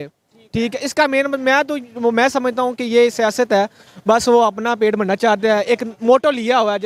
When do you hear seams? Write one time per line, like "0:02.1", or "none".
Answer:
none